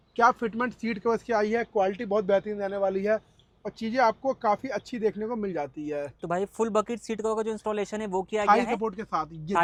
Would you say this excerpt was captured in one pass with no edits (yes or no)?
yes